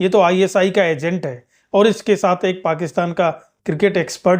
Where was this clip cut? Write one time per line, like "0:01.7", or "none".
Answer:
none